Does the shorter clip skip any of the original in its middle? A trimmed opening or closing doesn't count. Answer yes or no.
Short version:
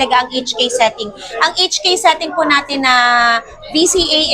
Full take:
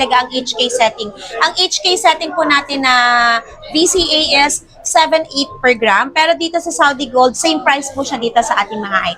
no